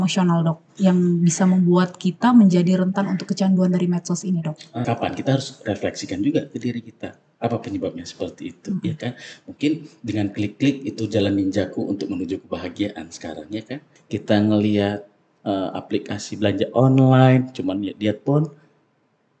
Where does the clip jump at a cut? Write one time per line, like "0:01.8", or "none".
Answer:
0:04.8
0:13.9